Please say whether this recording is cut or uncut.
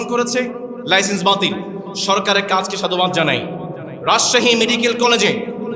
uncut